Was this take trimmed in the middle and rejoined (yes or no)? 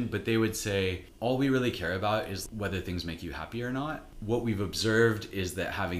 yes